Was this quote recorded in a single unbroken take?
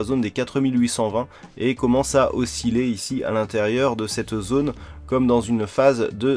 yes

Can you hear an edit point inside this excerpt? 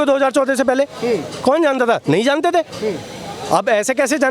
no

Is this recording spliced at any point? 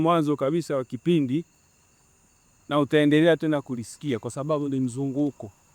no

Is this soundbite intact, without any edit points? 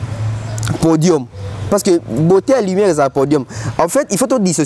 yes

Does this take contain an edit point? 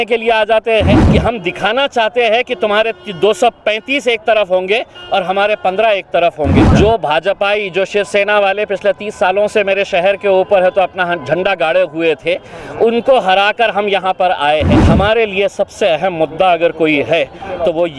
yes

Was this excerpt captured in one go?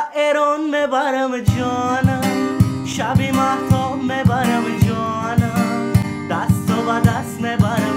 yes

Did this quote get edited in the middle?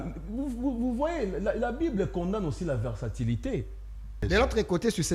yes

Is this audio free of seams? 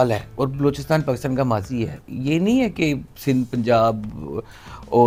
yes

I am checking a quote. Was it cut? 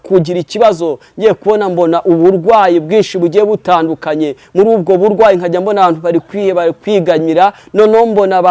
no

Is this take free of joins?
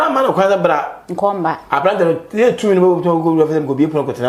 yes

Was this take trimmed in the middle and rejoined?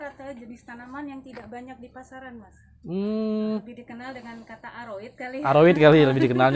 yes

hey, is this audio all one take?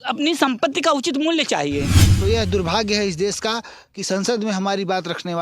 no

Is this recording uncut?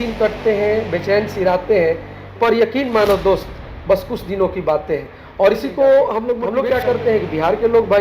no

